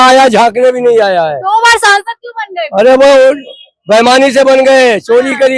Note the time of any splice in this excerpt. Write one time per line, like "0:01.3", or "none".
none